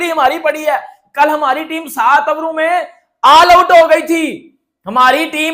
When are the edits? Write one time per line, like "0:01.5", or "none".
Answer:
none

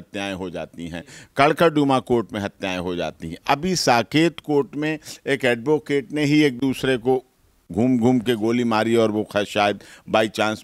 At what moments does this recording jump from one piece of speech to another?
none

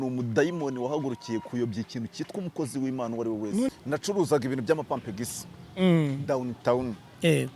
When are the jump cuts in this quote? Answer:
0:03.7

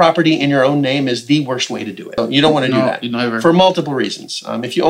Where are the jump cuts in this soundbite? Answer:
0:02.2

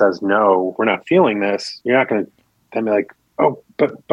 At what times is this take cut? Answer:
0:00.8
0:01.7

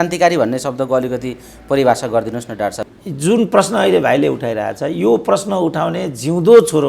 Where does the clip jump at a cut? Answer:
0:02.9

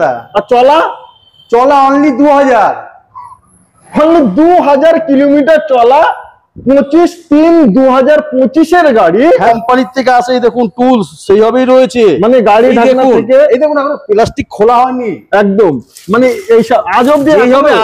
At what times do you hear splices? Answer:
0:09.4

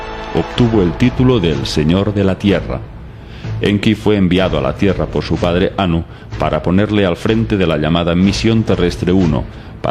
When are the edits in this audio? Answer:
0:06.5

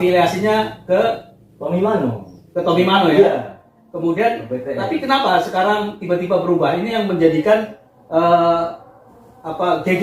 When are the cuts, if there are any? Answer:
none

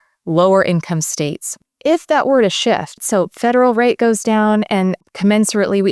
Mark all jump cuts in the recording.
0:01.5
0:03.0
0:05.0

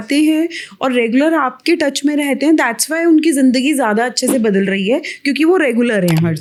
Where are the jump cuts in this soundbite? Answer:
none

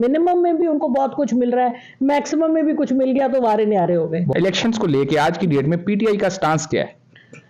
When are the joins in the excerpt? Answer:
0:04.3

